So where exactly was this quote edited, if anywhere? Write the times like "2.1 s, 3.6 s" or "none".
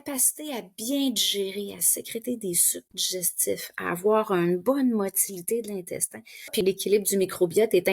6.5 s